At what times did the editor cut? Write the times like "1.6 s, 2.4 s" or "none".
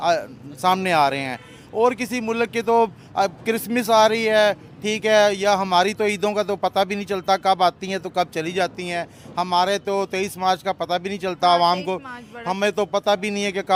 none